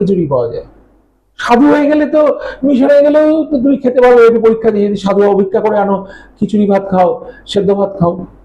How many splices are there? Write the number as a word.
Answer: zero